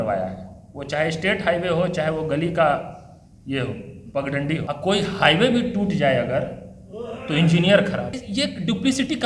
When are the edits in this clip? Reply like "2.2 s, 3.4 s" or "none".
4.7 s, 8.2 s